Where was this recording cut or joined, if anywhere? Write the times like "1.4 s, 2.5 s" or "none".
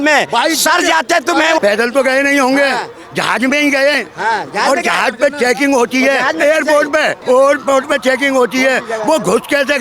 1.6 s, 7.2 s

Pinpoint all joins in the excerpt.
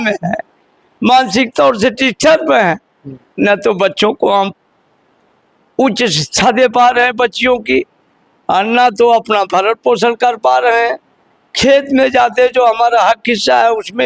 none

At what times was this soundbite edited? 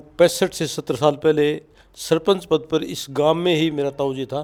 none

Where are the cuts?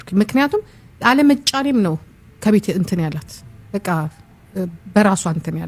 none

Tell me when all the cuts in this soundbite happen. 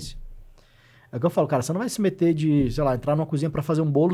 none

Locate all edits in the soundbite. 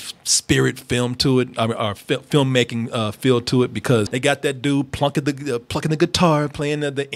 4.1 s

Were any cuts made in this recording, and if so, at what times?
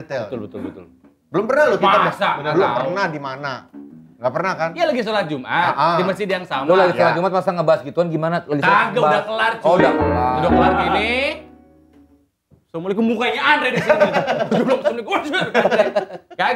none

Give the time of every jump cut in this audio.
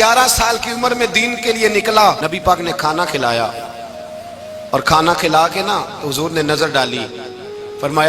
2.2 s

